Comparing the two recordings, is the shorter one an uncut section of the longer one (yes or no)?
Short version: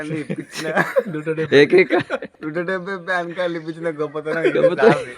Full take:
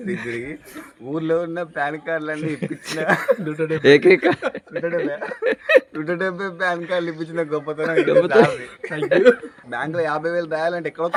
no